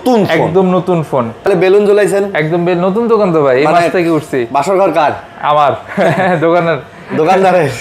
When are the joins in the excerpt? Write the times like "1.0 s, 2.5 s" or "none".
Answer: 1.5 s